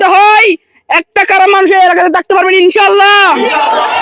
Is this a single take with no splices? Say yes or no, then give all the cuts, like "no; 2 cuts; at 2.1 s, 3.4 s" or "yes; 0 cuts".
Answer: yes; 0 cuts